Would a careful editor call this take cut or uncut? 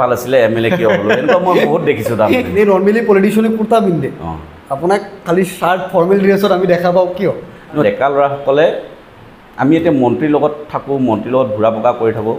cut